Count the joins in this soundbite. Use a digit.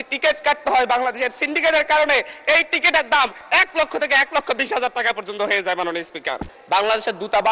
1